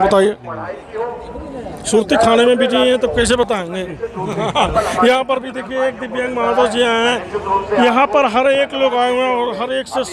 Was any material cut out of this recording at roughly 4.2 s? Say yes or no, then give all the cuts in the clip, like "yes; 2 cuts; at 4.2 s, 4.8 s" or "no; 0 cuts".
no; 0 cuts